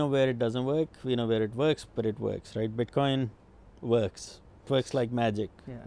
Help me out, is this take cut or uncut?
cut